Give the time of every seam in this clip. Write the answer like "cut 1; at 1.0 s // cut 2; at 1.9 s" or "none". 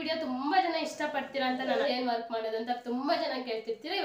cut 1; at 1.9 s